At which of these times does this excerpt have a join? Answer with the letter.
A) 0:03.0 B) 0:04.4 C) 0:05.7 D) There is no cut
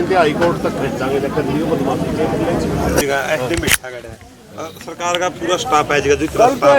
A